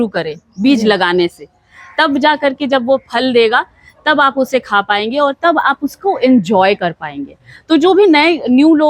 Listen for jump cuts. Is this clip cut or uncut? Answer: uncut